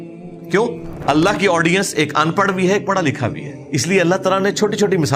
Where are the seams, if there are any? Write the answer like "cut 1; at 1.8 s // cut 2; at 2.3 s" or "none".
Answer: cut 1; at 0.9 s // cut 2; at 3.5 s